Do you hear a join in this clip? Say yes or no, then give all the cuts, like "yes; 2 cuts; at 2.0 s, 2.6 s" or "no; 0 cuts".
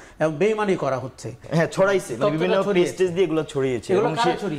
yes; 1 cut; at 1.4 s